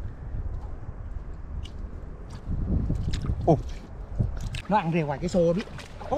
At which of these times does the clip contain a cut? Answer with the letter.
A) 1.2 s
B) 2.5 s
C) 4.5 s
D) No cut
C